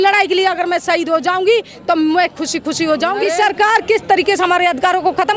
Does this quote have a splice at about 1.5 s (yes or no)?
no